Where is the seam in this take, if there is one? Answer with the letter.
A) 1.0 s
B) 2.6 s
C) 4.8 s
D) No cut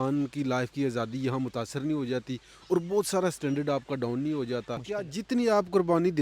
C